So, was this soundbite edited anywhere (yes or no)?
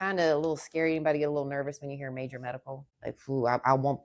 yes